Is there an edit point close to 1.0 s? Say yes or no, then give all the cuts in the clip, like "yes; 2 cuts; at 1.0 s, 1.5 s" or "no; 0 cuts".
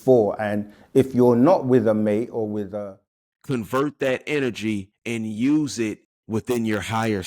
no; 3 cuts; at 2.7 s, 4.9 s, 6.1 s